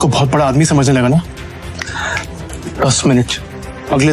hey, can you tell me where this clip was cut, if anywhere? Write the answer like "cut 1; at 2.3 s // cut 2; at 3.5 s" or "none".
none